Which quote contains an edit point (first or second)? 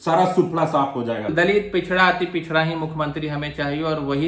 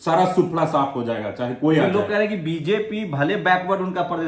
first